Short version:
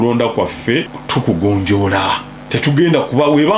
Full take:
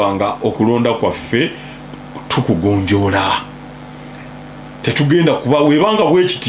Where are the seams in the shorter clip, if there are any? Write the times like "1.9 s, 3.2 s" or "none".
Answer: 1.0 s, 2.3 s